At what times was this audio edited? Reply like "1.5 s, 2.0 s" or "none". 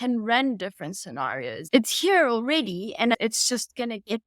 1.7 s, 3.1 s